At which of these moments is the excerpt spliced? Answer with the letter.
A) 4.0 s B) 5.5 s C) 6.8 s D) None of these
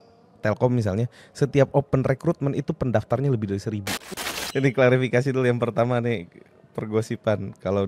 A